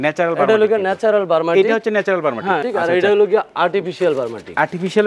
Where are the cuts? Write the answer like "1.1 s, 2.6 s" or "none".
2.6 s